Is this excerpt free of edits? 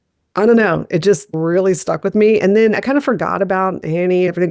yes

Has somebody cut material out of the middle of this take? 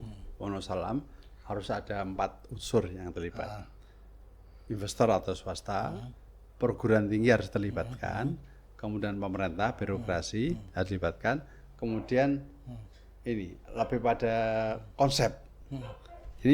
no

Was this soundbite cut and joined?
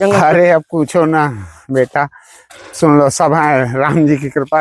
no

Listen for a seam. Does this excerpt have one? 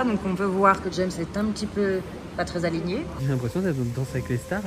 yes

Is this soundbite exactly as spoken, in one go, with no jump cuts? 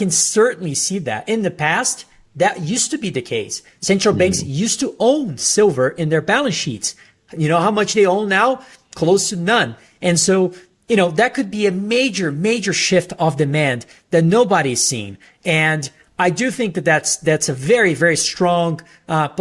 yes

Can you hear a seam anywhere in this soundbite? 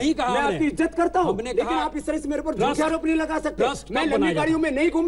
no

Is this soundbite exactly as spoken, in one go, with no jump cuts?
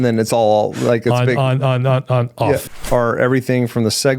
no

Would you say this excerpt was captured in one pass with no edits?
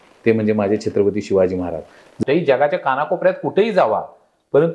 no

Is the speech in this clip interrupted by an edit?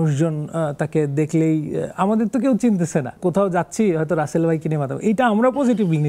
yes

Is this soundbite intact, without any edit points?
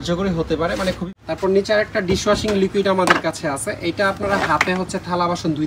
no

